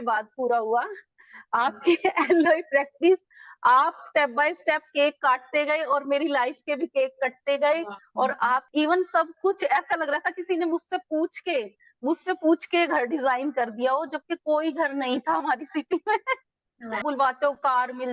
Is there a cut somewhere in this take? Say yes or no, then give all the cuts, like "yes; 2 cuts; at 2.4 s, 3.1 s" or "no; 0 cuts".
yes; 2 cuts; at 8.7 s, 17.0 s